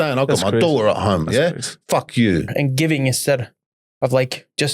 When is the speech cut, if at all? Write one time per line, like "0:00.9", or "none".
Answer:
0:02.5